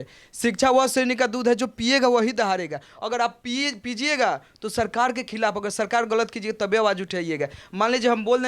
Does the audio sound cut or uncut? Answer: uncut